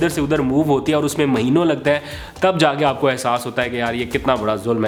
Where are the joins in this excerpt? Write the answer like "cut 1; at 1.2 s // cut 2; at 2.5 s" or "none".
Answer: none